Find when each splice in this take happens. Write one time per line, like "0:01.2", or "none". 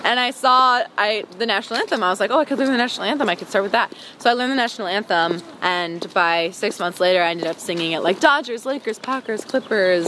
none